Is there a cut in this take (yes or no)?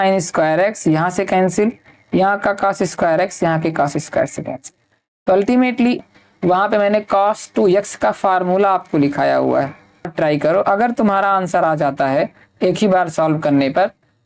yes